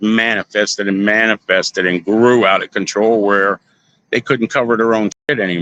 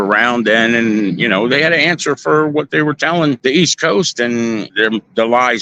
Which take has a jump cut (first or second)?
second